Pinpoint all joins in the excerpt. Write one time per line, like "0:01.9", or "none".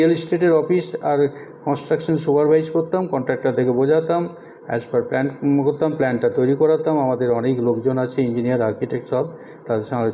none